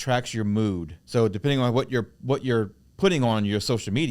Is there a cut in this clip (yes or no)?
yes